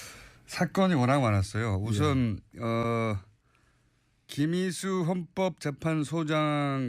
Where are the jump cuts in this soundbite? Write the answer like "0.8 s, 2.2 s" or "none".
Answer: 5.7 s

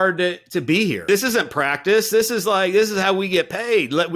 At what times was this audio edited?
1.0 s

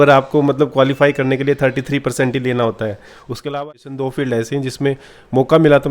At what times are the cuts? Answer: 3.5 s

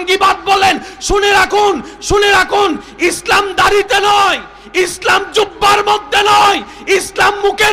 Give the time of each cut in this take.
none

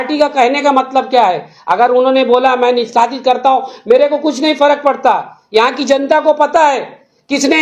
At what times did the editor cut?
none

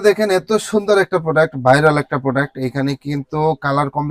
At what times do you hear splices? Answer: none

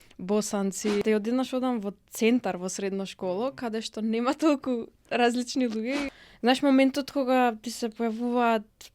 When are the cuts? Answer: 1.0 s, 6.2 s

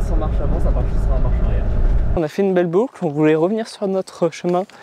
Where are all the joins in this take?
2.2 s

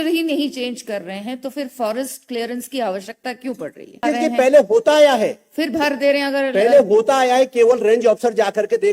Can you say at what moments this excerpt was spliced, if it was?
4.0 s

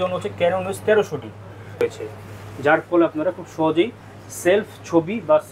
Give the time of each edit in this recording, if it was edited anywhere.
1.8 s

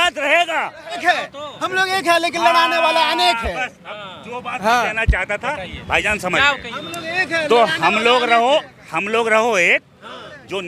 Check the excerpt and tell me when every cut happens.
1.0 s

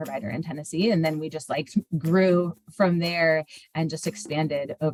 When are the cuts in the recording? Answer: none

